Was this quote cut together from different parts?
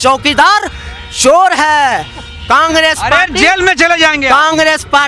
no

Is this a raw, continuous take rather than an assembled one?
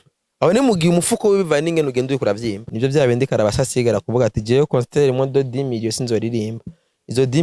no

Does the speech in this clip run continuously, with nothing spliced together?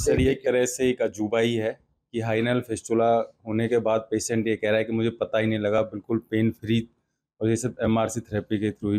yes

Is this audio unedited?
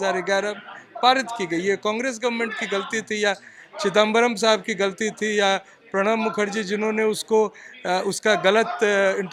yes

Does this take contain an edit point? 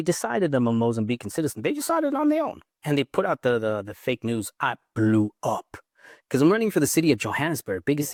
no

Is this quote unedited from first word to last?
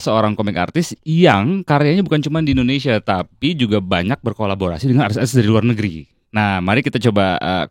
yes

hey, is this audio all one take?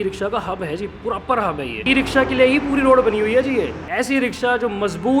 no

